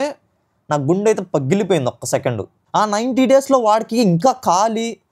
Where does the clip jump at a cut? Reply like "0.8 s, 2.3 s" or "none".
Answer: 2.5 s